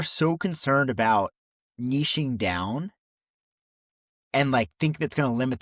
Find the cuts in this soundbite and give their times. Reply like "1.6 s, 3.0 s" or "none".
none